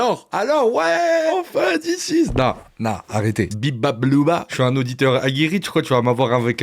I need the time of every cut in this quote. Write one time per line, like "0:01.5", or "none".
0:01.3
0:03.5
0:04.5